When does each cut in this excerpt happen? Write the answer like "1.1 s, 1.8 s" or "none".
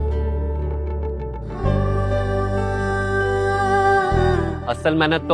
4.3 s